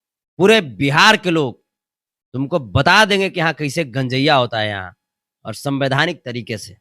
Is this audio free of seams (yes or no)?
yes